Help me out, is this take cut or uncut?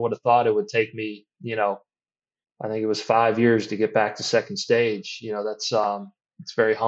uncut